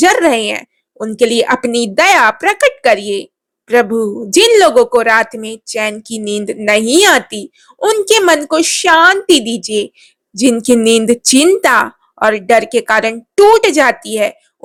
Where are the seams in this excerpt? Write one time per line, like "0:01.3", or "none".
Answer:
none